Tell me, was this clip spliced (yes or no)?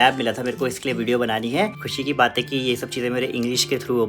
yes